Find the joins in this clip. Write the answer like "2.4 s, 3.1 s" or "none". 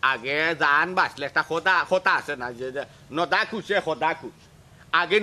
none